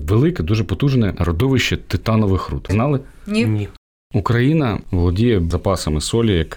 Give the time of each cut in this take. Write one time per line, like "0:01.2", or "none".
0:01.2
0:02.6
0:03.8
0:04.8